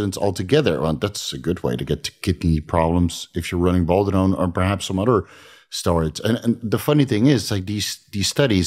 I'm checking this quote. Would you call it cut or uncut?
uncut